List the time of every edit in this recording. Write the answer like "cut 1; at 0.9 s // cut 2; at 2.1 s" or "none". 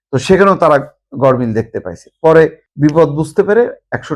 cut 1; at 2.6 s